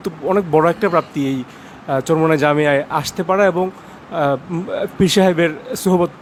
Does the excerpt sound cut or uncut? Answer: uncut